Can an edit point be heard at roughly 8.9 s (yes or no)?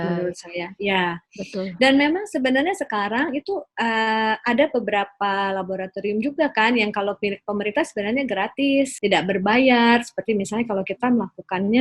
yes